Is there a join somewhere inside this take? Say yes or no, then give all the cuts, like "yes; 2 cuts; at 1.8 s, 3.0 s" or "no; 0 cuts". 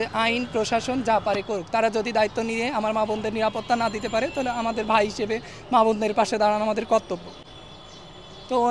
no; 0 cuts